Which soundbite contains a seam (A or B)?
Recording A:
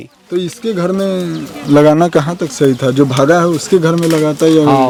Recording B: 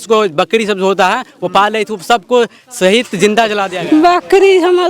B